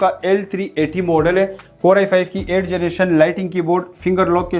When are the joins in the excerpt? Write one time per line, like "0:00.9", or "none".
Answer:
none